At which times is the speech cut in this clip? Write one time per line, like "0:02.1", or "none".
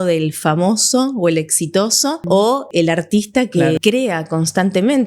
0:02.7
0:03.8